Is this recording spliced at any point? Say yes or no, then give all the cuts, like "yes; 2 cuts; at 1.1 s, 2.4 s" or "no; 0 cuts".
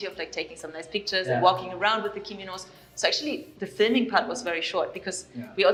no; 0 cuts